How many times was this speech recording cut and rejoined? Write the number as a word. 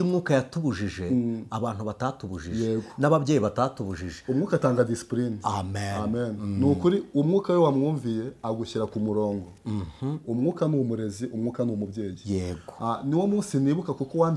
zero